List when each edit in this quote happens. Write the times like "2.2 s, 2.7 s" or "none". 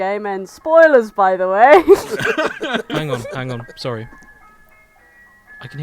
2.1 s

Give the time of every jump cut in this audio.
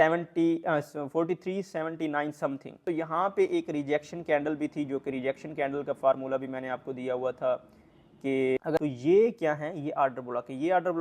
2.8 s, 8.8 s

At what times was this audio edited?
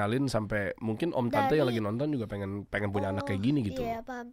none

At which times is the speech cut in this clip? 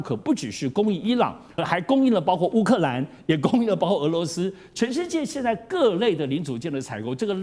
1.5 s

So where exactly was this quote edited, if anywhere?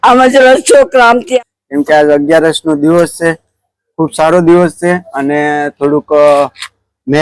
1.2 s

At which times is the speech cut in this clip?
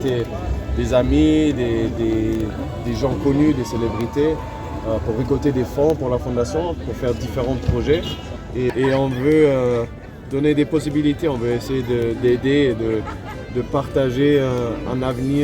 8.7 s

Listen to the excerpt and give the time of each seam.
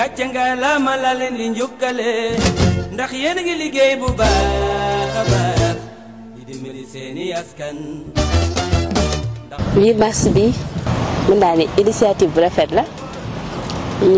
9.6 s

